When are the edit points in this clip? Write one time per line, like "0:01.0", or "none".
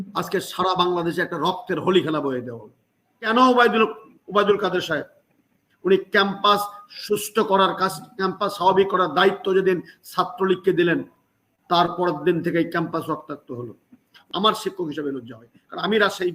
0:03.3
0:14.1